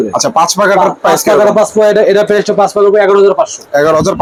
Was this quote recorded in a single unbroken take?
yes; 0 cuts

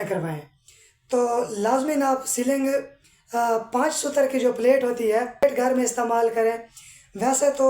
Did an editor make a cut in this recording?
yes; 1 cut; at 5.5 s

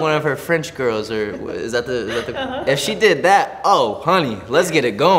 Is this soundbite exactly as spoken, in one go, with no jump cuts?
no; 1 cut; at 2.6 s

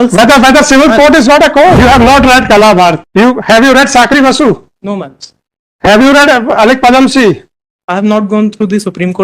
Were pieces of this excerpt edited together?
yes; 2 cuts; at 1.8 s, 3.0 s

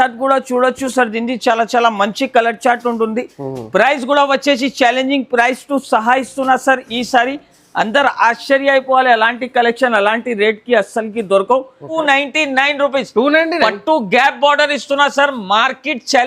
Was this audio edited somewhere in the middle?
yes; 1 cut; at 12.0 s

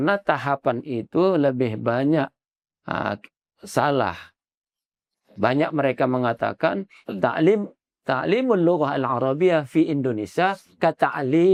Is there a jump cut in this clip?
no; 0 cuts

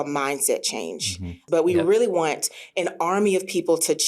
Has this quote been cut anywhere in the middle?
yes; 1 cut; at 1.4 s

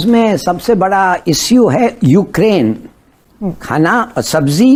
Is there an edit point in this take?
no; 0 cuts

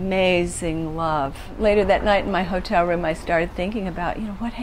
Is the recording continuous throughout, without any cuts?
no; 1 cut; at 1.5 s

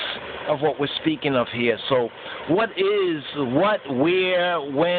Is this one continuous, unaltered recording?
no; 1 cut; at 1.8 s

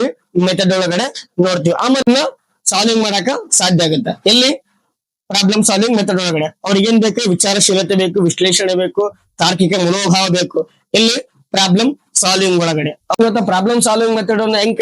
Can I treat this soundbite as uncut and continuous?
no; 2 cuts; at 2.0 s, 13.1 s

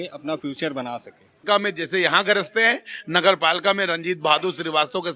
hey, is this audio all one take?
no; 1 cut; at 1.4 s

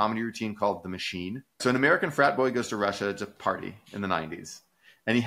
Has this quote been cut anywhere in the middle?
yes; 1 cut; at 1.6 s

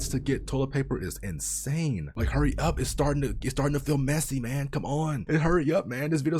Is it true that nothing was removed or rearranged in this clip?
yes; 0 cuts

